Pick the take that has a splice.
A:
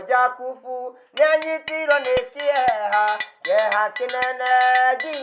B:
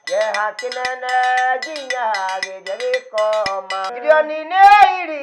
B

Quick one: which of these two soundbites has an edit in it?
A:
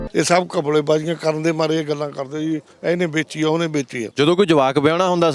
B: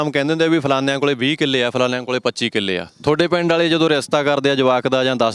A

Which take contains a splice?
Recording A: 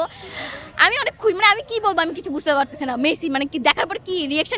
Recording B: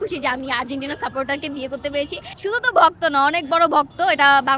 B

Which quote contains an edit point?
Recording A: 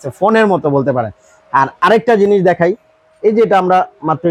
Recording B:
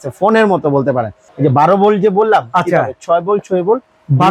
B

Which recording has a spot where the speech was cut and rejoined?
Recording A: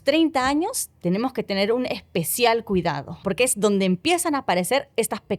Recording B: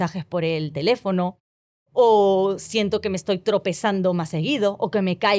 A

